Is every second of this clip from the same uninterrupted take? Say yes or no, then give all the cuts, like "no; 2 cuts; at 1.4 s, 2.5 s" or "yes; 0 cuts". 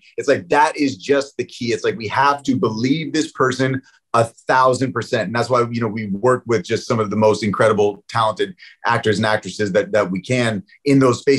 yes; 0 cuts